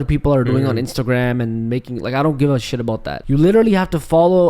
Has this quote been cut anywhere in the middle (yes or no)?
yes